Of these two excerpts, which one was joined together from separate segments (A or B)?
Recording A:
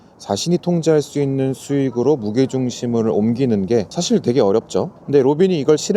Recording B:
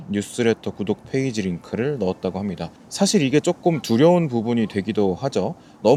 A